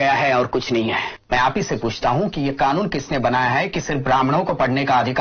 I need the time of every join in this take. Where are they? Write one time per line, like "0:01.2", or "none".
0:01.2